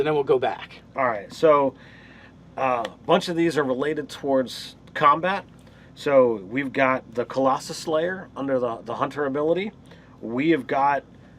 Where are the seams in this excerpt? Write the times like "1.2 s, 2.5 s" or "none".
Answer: 5.7 s

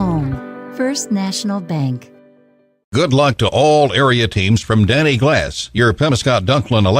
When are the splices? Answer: 2.8 s

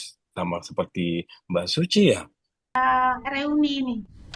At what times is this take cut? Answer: 2.8 s

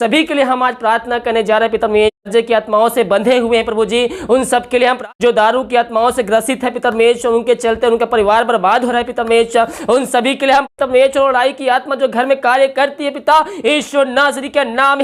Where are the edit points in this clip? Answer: 2.2 s, 5.0 s, 10.7 s

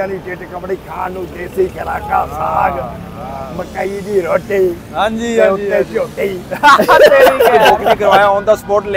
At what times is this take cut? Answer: 8.0 s

